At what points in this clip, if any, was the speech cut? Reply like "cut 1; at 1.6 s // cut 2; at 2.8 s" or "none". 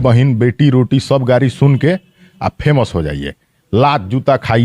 none